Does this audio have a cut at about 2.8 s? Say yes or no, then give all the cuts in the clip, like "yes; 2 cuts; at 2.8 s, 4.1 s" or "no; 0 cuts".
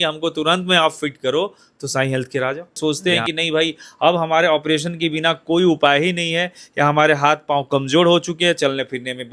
yes; 1 cut; at 2.8 s